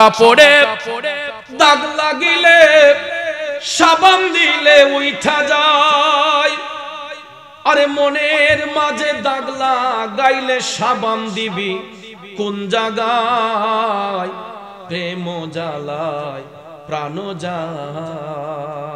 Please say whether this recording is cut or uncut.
uncut